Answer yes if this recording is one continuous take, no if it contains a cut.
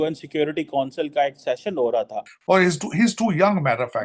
no